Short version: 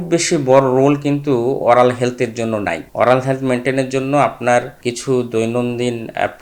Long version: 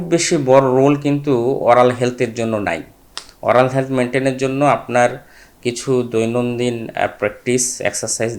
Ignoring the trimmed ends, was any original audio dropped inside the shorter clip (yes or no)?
yes